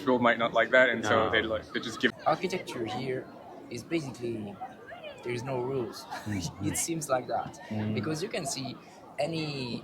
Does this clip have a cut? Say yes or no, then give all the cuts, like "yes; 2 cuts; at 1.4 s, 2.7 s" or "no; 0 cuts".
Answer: yes; 1 cut; at 2.1 s